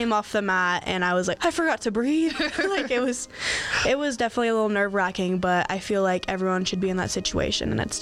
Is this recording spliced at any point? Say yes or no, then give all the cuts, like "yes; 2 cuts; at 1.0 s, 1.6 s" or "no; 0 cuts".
yes; 1 cut; at 1.4 s